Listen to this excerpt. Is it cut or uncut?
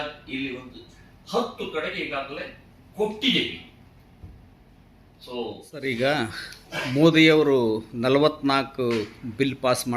cut